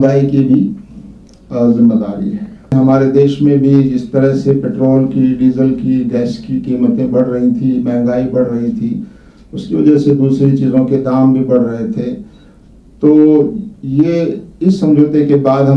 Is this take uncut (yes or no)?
no